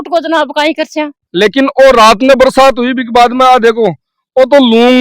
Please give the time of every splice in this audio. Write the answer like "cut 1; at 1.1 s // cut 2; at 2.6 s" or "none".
cut 1; at 1.3 s